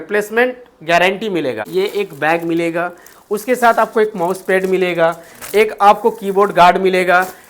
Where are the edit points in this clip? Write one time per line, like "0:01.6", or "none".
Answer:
0:01.7

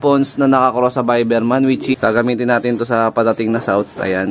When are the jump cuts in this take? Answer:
0:01.9

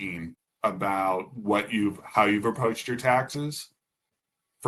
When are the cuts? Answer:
none

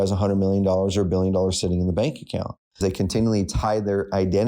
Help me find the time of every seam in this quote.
0:02.8

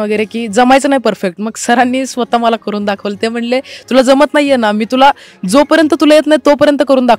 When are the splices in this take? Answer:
none

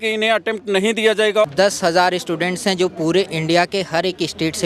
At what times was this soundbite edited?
0:01.5

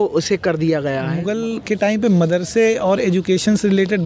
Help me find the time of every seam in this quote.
0:01.1

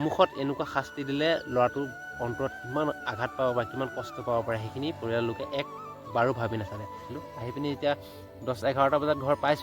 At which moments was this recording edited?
0:07.1

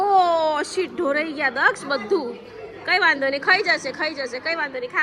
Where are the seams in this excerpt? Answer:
none

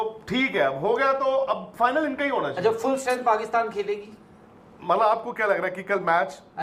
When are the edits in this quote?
none

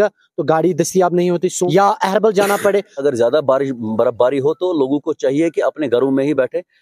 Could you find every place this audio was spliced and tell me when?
0:01.6
0:03.0

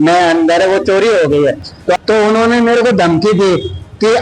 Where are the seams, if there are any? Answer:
0:02.0

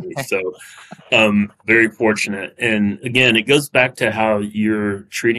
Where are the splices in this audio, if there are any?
0:01.6
0:03.0

